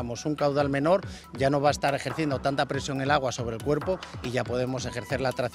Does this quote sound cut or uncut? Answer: uncut